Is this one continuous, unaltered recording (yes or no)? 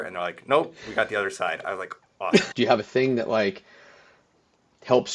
no